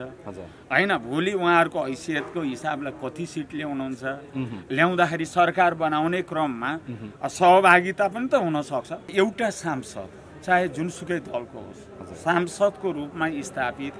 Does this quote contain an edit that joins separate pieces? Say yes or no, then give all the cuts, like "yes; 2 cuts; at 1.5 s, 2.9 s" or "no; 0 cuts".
yes; 1 cut; at 9.1 s